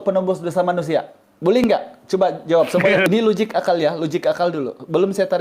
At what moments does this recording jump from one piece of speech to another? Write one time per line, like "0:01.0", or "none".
0:03.1

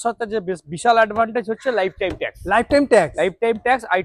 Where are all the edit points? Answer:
none

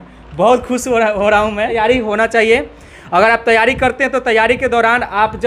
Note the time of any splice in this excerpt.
0:01.8

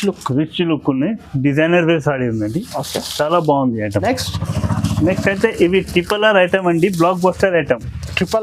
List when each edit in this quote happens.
0:03.9

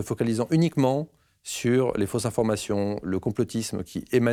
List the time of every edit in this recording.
none

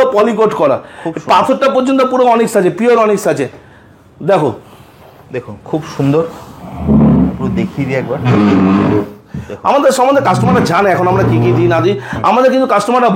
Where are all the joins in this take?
none

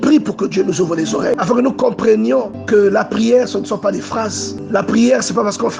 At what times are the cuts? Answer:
0:01.4
0:02.5
0:04.7

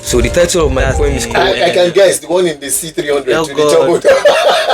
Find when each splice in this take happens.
0:01.3

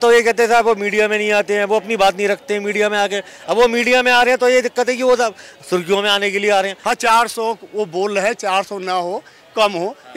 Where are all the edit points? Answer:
0:06.8

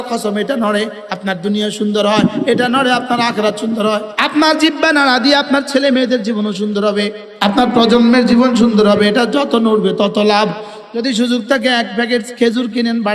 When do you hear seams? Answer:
0:04.1
0:07.2
0:10.7

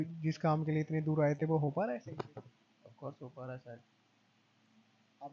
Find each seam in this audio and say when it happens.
none

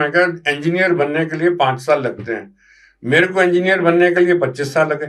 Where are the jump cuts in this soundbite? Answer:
none

